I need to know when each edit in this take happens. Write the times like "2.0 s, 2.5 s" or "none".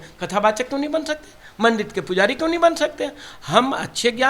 none